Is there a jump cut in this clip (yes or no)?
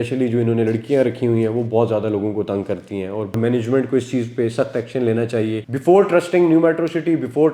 yes